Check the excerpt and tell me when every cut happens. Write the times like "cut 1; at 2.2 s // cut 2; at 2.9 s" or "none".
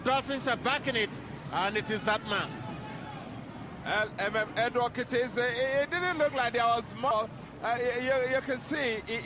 cut 1; at 7.4 s